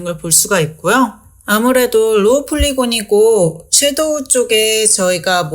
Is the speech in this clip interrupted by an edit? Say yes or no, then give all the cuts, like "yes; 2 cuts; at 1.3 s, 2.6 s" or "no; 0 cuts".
yes; 1 cut; at 1.3 s